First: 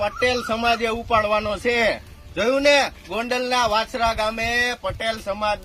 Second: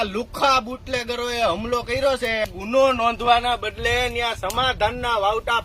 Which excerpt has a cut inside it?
second; 1 cut; at 2.4 s

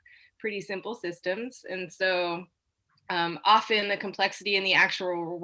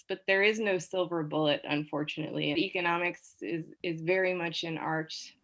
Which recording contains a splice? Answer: second; 1 cut; at 2.6 s

